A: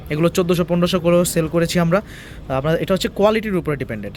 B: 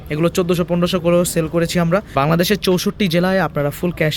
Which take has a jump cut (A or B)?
B